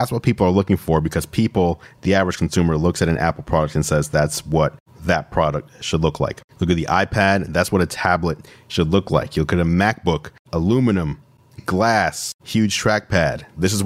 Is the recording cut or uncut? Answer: uncut